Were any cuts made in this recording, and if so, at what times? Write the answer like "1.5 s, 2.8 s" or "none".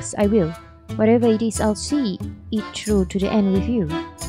none